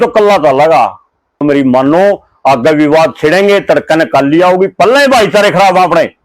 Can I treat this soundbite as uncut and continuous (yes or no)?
no